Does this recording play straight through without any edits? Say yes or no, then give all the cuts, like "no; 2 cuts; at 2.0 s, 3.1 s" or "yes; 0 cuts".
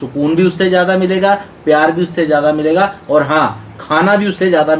yes; 0 cuts